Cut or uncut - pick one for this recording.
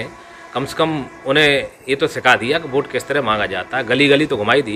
uncut